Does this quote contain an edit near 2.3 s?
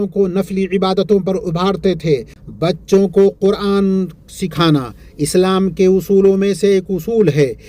yes; 1 cut; at 2.3 s

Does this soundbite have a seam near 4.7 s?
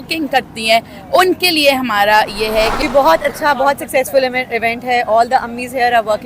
no; 1 cut; at 2.7 s

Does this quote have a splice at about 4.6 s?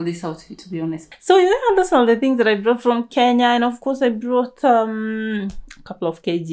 no; 1 cut; at 1.1 s

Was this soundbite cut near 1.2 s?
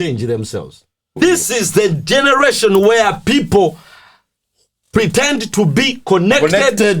yes; 1 cut; at 1.2 s

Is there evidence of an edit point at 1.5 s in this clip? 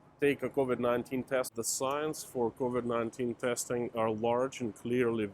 yes; 1 cut; at 1.5 s

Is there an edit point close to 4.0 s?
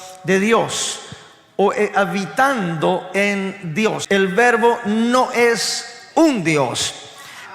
yes; 1 cut; at 4.0 s

